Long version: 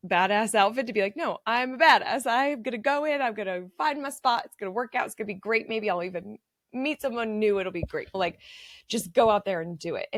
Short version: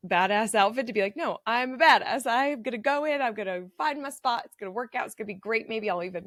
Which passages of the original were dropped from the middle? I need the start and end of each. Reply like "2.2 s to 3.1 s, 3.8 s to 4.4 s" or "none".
none